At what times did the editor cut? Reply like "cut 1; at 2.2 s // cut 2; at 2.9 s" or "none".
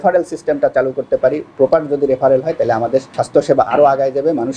cut 1; at 3.2 s

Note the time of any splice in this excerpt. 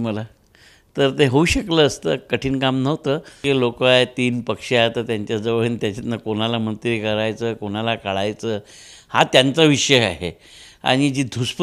cut 1; at 3.3 s

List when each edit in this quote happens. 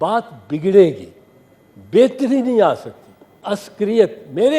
cut 1; at 3.4 s

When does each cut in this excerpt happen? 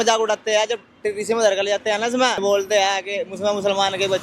cut 1; at 2.4 s

